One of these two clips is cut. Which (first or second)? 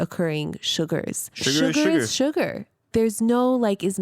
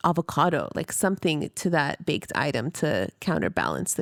first